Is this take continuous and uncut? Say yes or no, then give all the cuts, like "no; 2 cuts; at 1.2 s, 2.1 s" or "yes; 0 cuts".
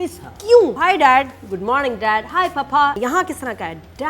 no; 2 cuts; at 0.8 s, 3.0 s